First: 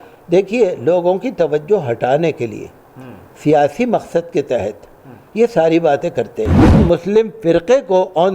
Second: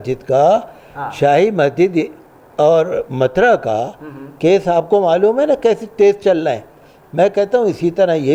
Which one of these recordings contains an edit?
first; 1 cut; at 6.7 s

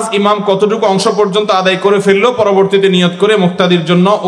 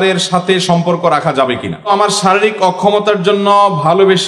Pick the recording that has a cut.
second; 1 cut; at 1.9 s

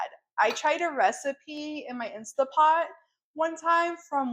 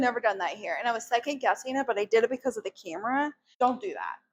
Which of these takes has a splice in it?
second; 1 cut; at 3.4 s

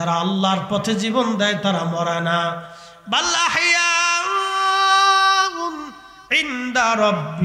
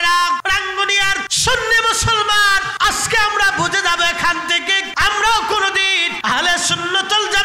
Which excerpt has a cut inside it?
second; 4 cuts; at 0.9 s, 2.7 s, 4.8 s, 6.1 s

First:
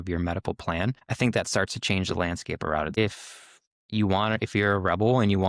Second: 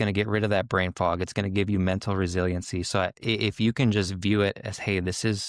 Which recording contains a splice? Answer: first; 2 cuts; at 1.0 s, 2.9 s

